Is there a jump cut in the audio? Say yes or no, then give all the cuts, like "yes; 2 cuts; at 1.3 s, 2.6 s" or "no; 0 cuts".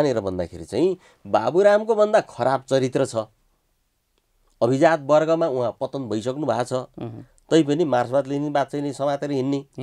no; 0 cuts